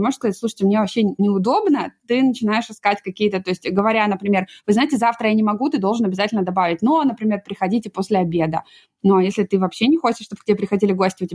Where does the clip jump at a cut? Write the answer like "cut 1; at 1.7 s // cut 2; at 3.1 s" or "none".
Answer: cut 1; at 1.2 s